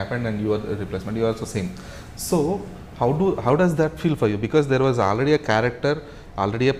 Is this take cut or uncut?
uncut